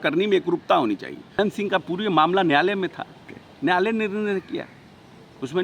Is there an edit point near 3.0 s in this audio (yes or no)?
no